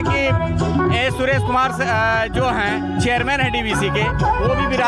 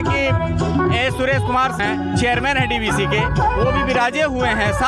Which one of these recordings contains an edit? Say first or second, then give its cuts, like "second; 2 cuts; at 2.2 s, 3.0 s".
second; 1 cut; at 1.8 s